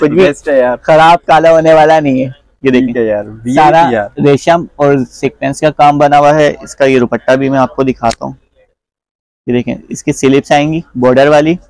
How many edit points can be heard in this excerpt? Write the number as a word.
zero